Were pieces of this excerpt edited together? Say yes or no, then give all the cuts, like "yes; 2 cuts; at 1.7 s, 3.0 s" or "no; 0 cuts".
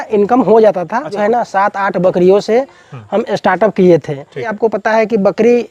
yes; 2 cuts; at 1.1 s, 4.5 s